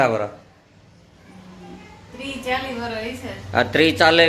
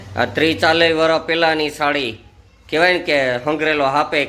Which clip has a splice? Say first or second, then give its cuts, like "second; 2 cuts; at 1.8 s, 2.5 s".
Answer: second; 1 cut; at 2.5 s